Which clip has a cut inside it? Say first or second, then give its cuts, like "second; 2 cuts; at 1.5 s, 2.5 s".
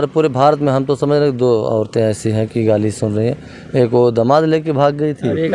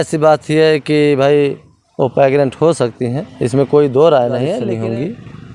second; 1 cut; at 4.6 s